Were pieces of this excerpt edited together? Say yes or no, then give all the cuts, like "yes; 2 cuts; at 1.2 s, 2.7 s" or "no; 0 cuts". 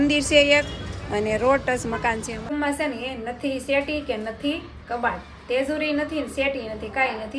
yes; 1 cut; at 2.5 s